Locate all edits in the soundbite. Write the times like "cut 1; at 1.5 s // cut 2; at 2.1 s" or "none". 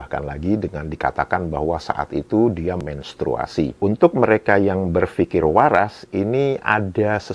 cut 1; at 3.7 s